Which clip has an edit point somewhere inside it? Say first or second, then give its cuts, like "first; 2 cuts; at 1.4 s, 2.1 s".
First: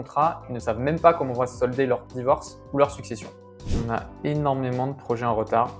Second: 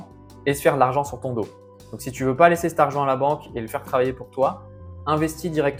first; 1 cut; at 3.7 s